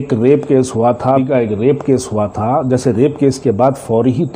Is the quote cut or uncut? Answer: cut